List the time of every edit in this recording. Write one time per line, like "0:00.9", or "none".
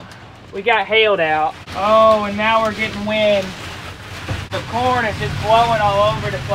0:01.6
0:04.4